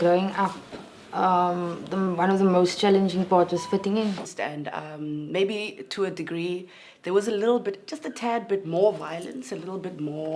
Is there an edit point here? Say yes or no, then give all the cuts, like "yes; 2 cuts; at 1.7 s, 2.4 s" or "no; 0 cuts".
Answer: no; 0 cuts